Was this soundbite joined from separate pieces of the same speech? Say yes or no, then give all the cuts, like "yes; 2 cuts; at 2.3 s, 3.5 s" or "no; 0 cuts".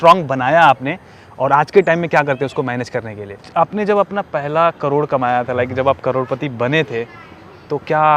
yes; 1 cut; at 3.4 s